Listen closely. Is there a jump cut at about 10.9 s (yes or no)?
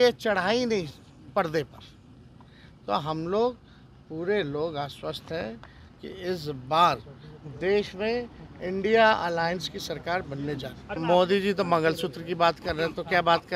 yes